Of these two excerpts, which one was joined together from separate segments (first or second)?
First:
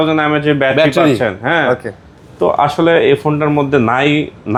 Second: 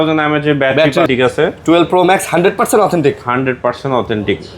second